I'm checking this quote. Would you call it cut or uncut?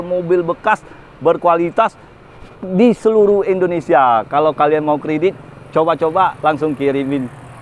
uncut